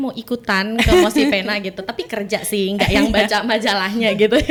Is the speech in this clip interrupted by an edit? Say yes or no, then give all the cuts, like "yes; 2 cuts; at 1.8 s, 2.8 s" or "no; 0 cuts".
no; 0 cuts